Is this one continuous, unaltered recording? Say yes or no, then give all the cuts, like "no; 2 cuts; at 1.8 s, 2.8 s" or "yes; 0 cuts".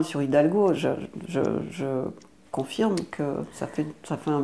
yes; 0 cuts